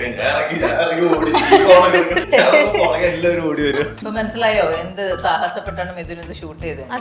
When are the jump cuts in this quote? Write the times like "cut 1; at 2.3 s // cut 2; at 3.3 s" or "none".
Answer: cut 1; at 2.2 s // cut 2; at 4.1 s